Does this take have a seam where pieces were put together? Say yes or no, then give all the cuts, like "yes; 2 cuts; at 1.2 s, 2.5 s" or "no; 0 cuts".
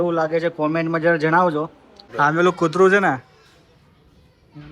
yes; 1 cut; at 2.0 s